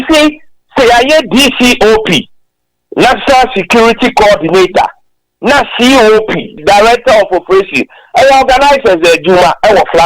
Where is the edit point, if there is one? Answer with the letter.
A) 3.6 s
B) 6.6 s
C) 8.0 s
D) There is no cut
B